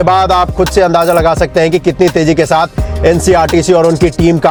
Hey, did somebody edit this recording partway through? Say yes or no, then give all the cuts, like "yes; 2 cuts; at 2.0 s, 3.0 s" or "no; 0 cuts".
no; 0 cuts